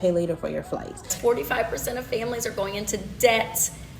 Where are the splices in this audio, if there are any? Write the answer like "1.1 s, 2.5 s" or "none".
1.1 s

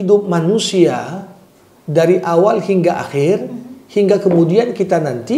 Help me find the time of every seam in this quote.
none

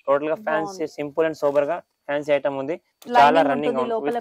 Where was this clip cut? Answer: none

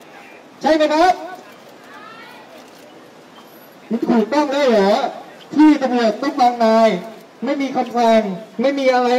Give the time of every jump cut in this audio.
none

